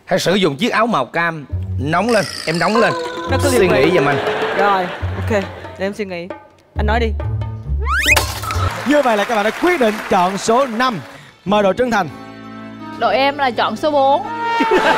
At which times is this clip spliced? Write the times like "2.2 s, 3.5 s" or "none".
8.7 s